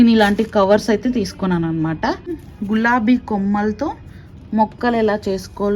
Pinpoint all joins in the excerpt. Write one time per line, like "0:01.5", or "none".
0:02.4

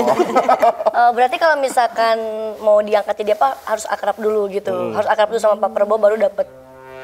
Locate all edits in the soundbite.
none

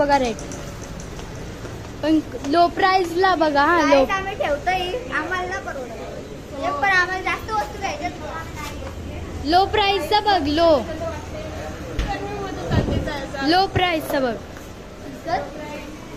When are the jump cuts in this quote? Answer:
none

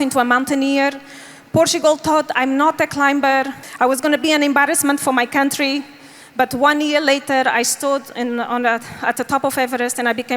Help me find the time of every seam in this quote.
none

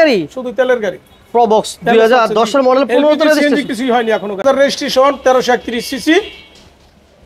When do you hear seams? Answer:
0:04.4

